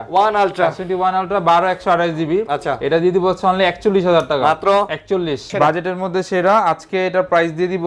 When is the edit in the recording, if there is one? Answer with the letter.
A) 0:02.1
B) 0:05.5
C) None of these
B